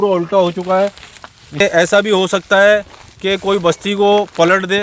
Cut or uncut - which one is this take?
cut